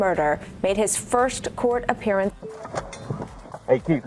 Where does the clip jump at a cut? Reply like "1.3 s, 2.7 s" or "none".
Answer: 2.3 s